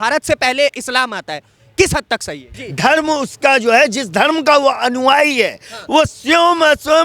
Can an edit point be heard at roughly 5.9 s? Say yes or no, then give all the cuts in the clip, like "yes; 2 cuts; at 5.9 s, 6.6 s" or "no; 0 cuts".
no; 1 cut; at 2.6 s